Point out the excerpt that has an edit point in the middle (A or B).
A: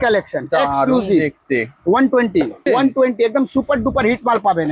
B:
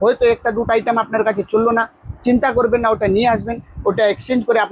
A